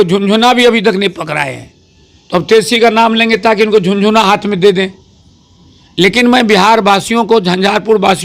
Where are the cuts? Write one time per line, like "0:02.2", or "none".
none